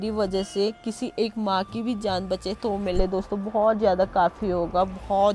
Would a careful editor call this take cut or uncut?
uncut